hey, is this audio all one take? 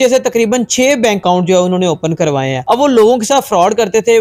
no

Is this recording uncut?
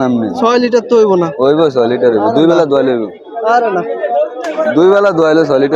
yes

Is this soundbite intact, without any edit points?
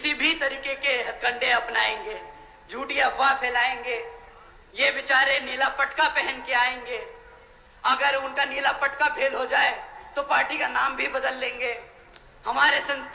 yes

